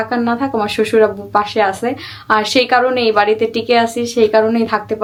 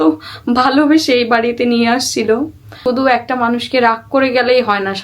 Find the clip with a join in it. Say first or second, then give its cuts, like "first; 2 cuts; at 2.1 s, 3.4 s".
second; 1 cut; at 2.8 s